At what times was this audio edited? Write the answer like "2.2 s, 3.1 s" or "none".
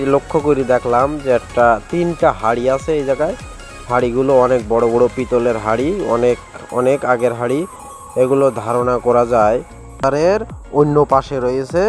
10.0 s